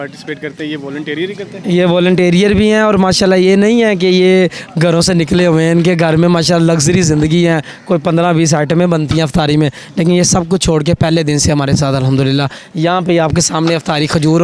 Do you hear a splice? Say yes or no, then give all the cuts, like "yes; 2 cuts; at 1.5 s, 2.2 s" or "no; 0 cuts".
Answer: no; 0 cuts